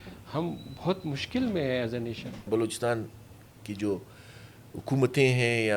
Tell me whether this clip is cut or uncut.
cut